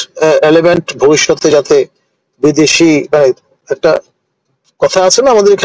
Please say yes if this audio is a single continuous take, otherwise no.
yes